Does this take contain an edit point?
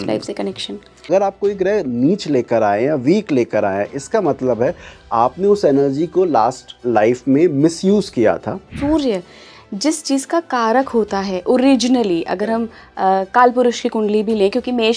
yes; 2 cuts; at 1.1 s, 8.7 s

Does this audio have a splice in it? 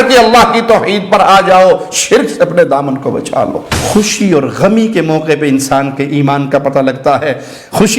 yes; 1 cut; at 3.7 s

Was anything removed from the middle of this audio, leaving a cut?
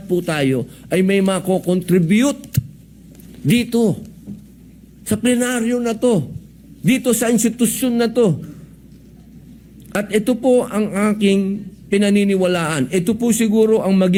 no; 0 cuts

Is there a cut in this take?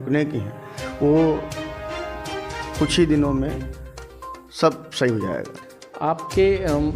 no; 0 cuts

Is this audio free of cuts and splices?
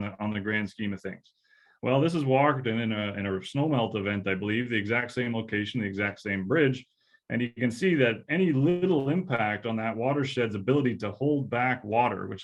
yes; 0 cuts

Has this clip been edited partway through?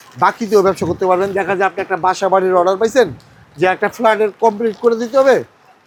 no; 0 cuts

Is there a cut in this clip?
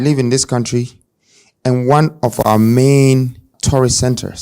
yes; 1 cut; at 3.5 s

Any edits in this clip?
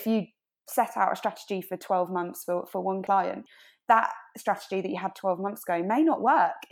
yes; 1 cut; at 3.2 s

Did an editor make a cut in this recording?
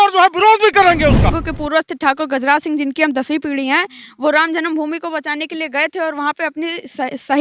yes; 1 cut; at 1.3 s

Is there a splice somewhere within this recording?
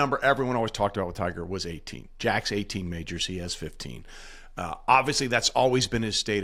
no; 0 cuts

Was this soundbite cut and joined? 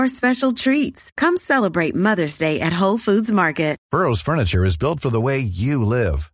yes; 1 cut; at 3.8 s

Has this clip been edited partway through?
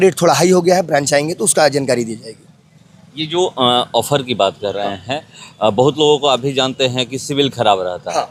no; 0 cuts

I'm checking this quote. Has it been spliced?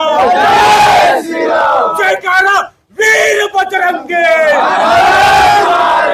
no; 0 cuts

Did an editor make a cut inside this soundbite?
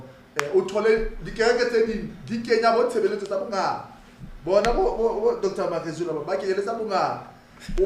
no; 0 cuts

